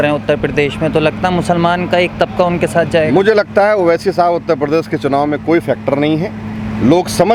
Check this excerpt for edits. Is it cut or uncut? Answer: uncut